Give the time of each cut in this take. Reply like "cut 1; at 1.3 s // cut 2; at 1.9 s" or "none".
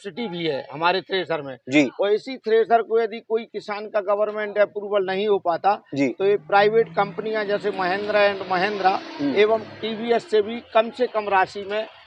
none